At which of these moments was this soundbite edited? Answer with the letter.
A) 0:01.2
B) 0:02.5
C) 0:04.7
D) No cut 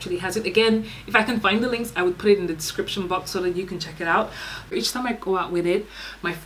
C